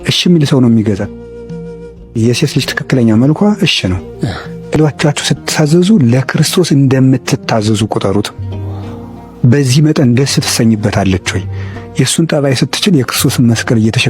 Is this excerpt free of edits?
no; 1 cut; at 4.8 s

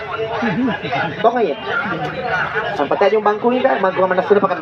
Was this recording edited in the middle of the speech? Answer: no; 0 cuts

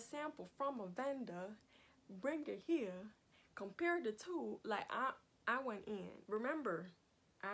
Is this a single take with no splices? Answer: no; 1 cut; at 6.2 s

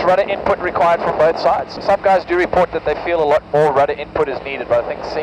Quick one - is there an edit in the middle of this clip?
yes; 1 cut; at 1.8 s

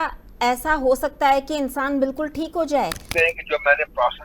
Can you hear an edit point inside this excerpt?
yes; 1 cut; at 3.1 s

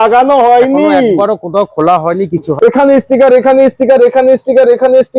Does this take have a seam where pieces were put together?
yes; 1 cut; at 2.5 s

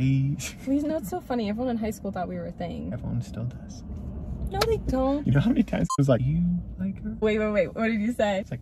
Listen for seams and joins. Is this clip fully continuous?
yes; 0 cuts

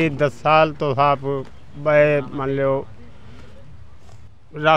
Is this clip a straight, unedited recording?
yes; 0 cuts

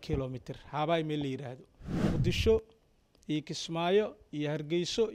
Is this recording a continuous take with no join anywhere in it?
no; 1 cut; at 1.9 s

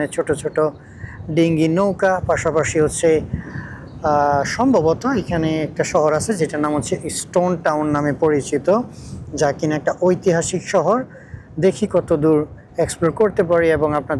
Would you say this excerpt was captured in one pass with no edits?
yes; 0 cuts

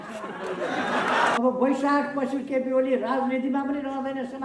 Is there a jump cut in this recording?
yes; 1 cut; at 1.4 s

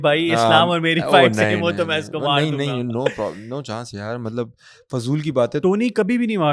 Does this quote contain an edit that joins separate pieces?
yes; 1 cut; at 5.6 s

